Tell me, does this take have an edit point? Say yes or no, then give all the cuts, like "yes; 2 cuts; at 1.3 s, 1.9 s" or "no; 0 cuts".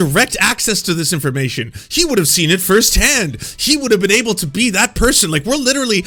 no; 0 cuts